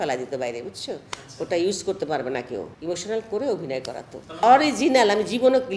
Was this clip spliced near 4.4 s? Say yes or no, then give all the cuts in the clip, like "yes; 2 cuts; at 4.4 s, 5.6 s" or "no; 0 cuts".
yes; 2 cuts; at 2.7 s, 4.4 s